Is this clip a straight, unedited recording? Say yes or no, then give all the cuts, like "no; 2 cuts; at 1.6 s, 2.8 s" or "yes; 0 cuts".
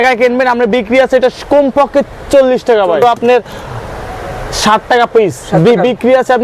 no; 1 cut; at 3.0 s